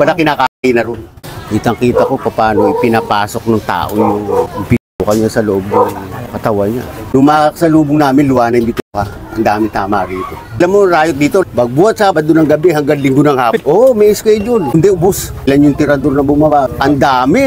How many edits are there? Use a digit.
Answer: 4